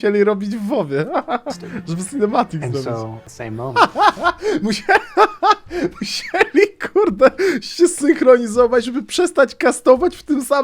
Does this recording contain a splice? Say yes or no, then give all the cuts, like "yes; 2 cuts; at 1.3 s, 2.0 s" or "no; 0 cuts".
yes; 1 cut; at 3.2 s